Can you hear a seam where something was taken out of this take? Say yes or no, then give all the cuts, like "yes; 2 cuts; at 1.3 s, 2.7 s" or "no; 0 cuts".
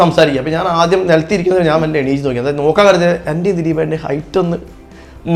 no; 0 cuts